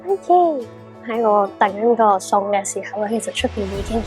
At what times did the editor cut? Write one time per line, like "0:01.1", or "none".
0:01.1